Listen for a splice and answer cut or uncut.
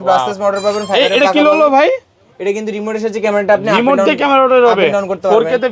uncut